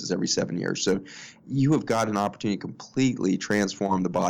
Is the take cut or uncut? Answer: uncut